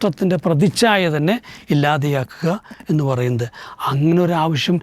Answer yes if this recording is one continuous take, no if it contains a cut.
yes